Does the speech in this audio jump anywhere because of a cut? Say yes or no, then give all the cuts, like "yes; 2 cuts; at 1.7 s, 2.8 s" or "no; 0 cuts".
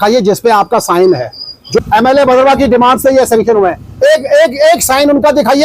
yes; 1 cut; at 1.8 s